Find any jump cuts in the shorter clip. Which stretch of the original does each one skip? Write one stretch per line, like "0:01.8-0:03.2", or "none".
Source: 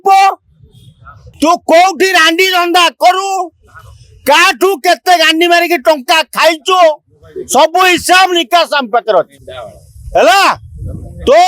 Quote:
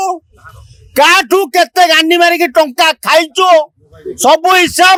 none